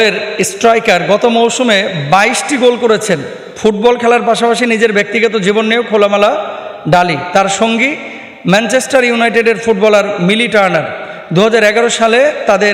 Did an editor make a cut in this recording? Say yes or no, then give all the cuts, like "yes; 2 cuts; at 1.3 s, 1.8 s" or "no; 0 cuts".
no; 0 cuts